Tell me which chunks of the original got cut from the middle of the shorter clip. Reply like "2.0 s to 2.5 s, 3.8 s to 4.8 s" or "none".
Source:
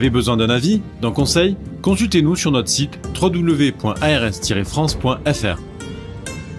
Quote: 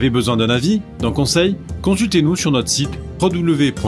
none